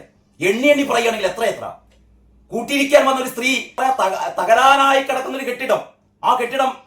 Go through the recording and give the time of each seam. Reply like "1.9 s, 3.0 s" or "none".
3.7 s